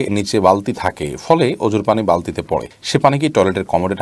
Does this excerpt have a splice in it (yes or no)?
no